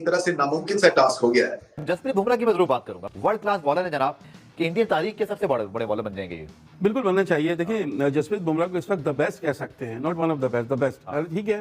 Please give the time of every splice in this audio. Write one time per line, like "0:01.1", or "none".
0:01.7
0:04.4